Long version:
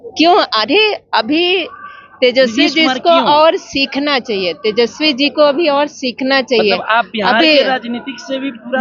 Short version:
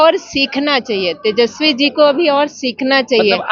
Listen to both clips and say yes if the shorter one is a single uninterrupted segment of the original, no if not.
yes